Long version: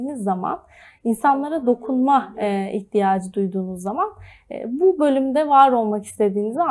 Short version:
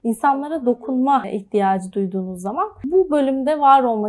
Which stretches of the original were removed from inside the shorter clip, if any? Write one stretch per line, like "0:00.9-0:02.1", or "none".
0:02.3-0:02.7
0:04.2-0:04.7